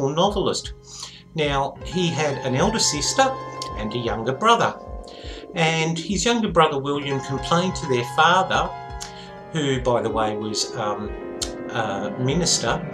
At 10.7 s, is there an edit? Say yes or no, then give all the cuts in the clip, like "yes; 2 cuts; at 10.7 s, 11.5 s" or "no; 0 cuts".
no; 1 cut; at 7.6 s